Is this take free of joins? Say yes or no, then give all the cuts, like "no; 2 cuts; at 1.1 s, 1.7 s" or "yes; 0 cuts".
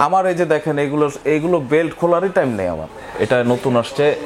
no; 1 cut; at 3.0 s